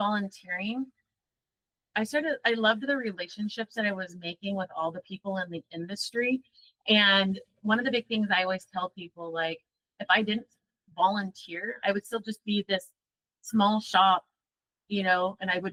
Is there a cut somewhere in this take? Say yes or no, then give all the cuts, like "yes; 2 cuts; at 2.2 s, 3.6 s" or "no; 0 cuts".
no; 0 cuts